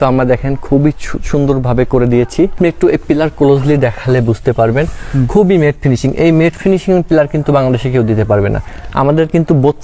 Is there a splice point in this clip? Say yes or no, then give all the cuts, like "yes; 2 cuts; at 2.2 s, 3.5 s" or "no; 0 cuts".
yes; 2 cuts; at 2.5 s, 8.7 s